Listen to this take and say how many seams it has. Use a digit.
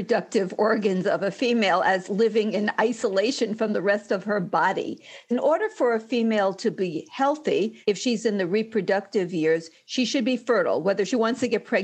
2